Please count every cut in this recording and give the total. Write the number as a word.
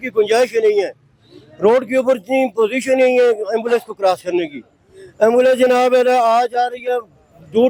zero